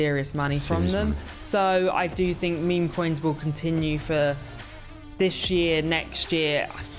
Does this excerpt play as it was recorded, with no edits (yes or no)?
yes